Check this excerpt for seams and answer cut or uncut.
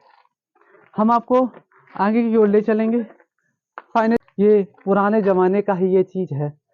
cut